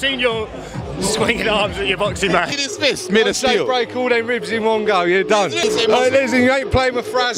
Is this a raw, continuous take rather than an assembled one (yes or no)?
no